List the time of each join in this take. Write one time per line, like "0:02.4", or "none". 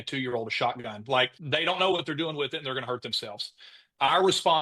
0:01.4